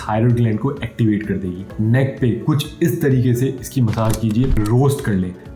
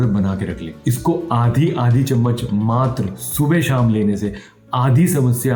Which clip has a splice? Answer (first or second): first